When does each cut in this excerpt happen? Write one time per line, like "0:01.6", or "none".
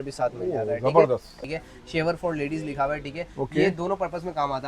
0:01.4